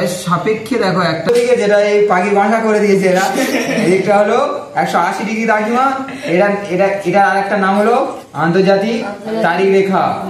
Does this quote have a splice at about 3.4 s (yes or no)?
no